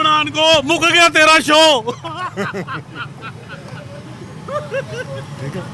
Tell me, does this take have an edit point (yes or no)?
no